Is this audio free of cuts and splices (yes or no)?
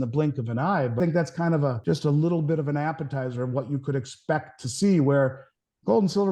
no